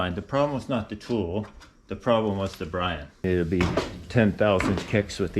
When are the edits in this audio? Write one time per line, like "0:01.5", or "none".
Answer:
0:03.2